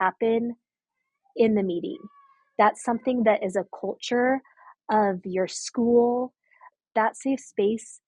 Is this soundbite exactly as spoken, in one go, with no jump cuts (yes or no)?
no